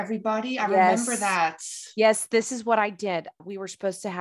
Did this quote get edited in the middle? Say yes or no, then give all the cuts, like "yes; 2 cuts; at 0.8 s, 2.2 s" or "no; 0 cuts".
no; 0 cuts